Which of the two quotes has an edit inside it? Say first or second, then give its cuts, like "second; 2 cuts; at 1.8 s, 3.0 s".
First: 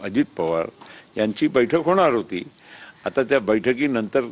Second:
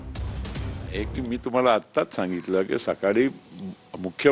second; 1 cut; at 0.9 s